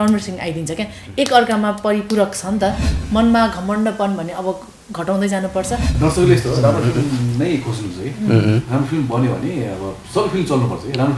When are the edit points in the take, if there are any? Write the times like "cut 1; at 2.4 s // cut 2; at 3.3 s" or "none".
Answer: cut 1; at 2.9 s // cut 2; at 5.9 s